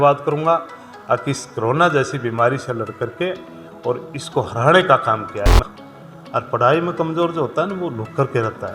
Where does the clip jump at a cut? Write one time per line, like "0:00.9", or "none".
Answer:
0:05.6